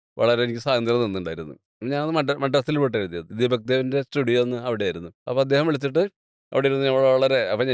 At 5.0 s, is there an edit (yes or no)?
yes